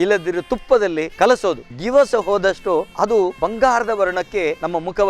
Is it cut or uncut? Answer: cut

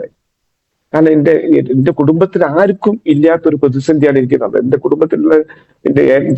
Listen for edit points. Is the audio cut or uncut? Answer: uncut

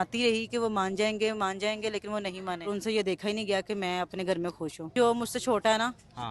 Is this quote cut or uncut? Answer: cut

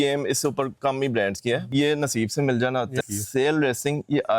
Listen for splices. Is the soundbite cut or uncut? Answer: cut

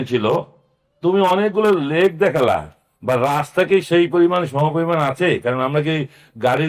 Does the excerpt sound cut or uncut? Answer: uncut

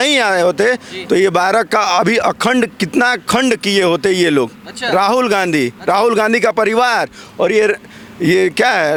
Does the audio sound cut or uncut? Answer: uncut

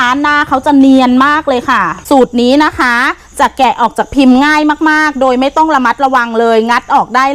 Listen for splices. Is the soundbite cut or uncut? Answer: cut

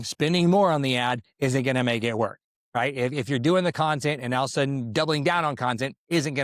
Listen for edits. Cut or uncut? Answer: uncut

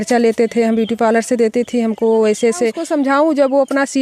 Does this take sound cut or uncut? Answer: cut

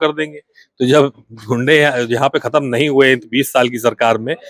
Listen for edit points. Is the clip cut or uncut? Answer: uncut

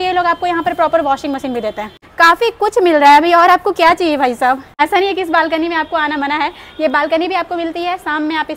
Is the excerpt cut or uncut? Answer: uncut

